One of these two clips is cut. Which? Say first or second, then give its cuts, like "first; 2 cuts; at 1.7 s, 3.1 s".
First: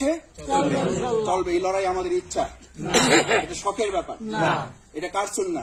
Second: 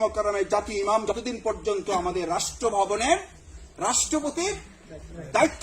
second; 1 cut; at 1.1 s